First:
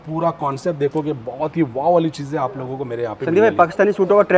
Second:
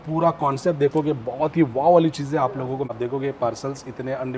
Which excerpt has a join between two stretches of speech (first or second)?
second